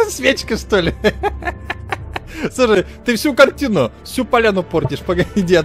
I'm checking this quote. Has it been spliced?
no; 0 cuts

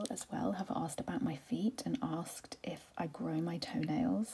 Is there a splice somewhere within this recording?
no; 0 cuts

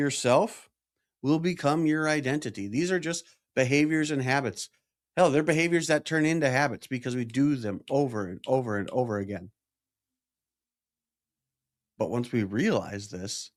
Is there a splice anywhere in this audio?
no; 0 cuts

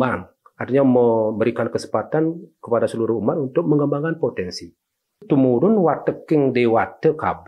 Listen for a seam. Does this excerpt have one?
yes; 1 cut; at 5.2 s

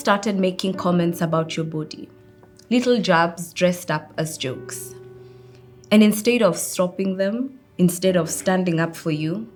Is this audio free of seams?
yes; 0 cuts

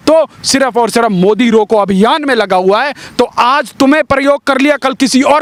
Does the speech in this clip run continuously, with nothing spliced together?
yes; 0 cuts

